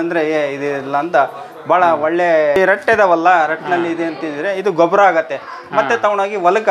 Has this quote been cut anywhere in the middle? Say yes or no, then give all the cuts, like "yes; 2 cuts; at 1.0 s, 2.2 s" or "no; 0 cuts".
yes; 1 cut; at 2.6 s